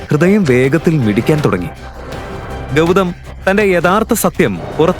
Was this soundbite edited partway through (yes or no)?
no